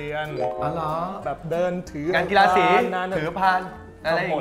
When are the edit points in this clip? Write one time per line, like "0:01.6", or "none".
none